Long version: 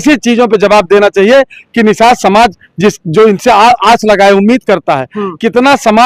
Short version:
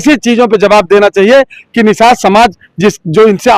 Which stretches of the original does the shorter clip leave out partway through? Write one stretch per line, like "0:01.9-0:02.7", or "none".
none